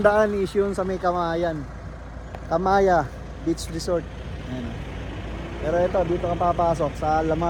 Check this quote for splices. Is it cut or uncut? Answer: uncut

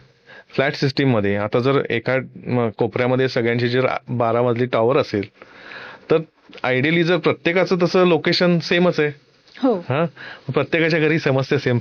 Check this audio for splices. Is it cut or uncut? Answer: uncut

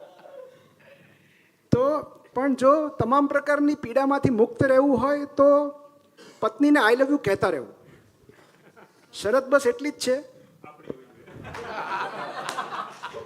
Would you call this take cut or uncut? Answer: cut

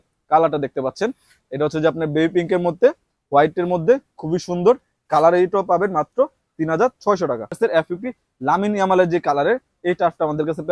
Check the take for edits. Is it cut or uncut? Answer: cut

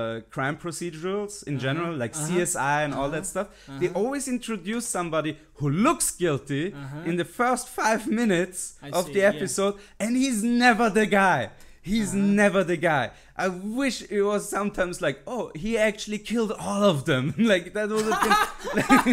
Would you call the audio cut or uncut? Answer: uncut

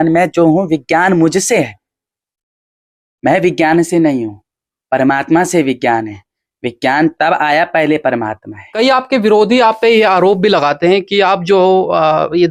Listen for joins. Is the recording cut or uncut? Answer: uncut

